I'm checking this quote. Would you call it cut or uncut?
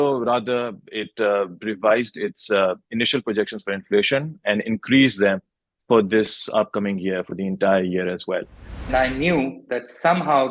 cut